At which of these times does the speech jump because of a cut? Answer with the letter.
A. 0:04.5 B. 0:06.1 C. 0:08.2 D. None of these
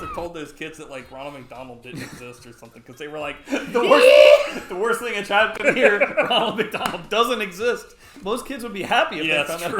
C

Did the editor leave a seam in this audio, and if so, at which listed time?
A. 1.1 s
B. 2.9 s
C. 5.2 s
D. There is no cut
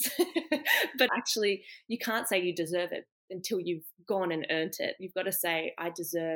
A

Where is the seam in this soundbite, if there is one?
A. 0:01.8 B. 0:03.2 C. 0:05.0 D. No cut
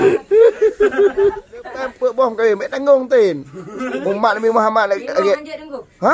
A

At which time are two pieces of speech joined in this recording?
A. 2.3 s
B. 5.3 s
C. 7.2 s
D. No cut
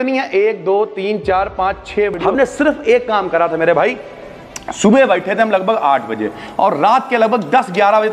A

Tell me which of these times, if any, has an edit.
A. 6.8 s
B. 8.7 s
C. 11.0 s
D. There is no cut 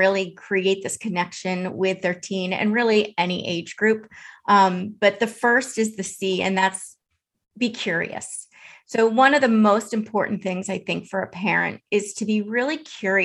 D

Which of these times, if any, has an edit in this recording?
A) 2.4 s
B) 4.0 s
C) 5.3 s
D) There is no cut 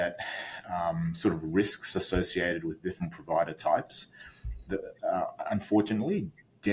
D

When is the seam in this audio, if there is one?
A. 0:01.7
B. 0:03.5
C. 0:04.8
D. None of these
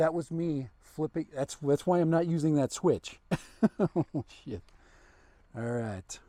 D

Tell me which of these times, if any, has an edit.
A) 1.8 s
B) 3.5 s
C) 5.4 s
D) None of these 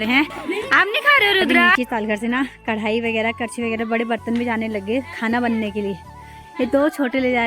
A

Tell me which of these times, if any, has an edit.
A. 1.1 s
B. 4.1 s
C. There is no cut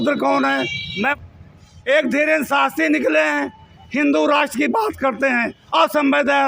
A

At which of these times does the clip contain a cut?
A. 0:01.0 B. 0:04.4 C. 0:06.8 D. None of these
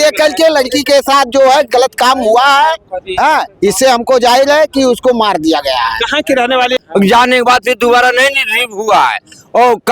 C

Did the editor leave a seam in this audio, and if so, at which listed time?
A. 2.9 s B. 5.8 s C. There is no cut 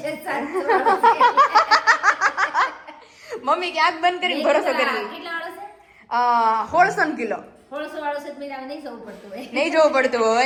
C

